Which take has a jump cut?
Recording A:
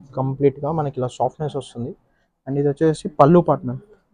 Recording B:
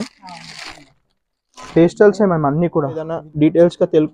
B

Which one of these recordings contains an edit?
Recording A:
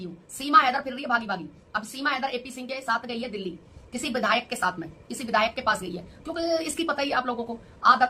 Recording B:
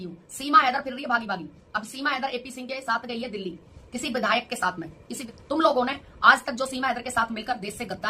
B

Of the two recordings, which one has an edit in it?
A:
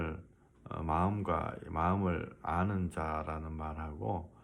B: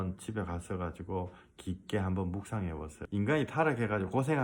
B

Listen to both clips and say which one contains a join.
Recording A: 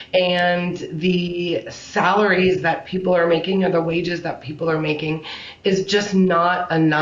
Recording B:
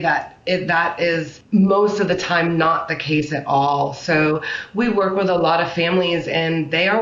B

